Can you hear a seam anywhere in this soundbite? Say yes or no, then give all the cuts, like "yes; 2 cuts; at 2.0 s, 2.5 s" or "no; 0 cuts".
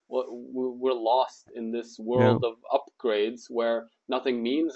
no; 0 cuts